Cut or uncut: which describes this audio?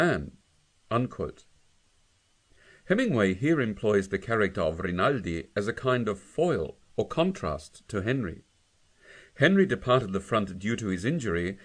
cut